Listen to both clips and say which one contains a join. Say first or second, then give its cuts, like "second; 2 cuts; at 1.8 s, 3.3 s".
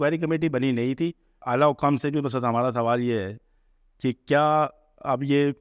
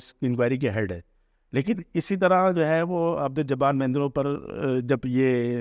first; 1 cut; at 1.3 s